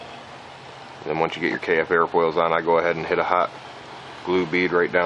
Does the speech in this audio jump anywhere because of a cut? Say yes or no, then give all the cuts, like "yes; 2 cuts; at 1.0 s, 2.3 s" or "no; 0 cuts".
yes; 1 cut; at 3.0 s